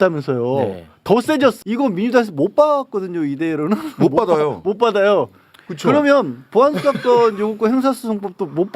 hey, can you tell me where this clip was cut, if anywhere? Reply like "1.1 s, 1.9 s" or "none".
1.6 s